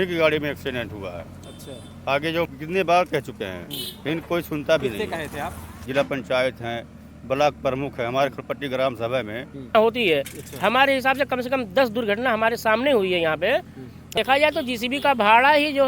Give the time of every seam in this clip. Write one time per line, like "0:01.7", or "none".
0:02.5
0:05.8
0:09.7
0:14.2